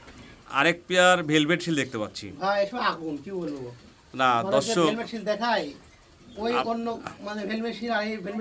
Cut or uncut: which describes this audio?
uncut